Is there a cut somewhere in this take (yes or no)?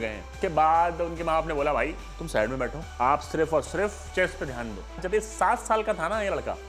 yes